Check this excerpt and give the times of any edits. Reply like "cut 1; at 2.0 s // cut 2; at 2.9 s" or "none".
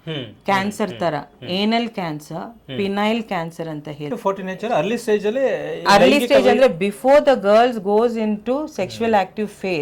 cut 1; at 4.1 s

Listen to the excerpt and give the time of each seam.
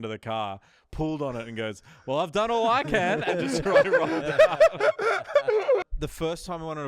cut 1; at 5.8 s

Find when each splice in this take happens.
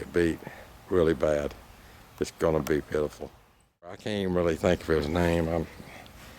cut 1; at 4.1 s

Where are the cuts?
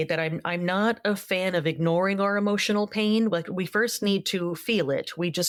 none

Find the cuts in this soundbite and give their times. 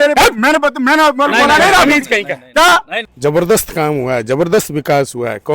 cut 1; at 3.0 s

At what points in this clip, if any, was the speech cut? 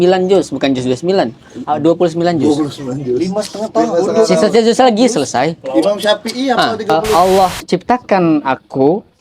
cut 1; at 7.0 s

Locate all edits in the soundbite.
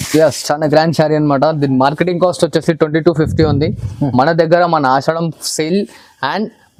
none

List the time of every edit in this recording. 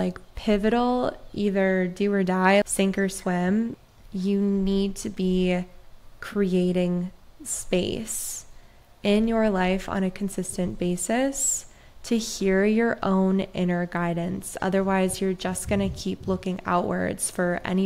cut 1; at 2.6 s // cut 2; at 3.8 s

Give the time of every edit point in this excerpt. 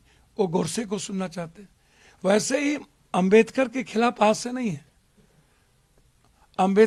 none

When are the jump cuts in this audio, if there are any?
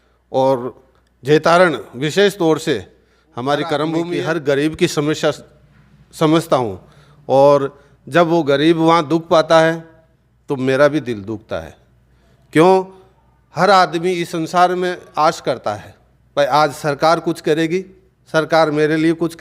cut 1; at 4.1 s

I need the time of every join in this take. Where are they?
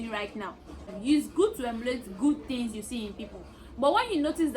cut 1; at 0.9 s

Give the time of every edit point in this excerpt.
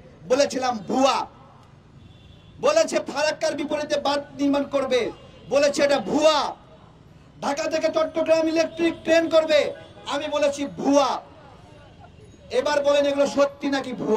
none

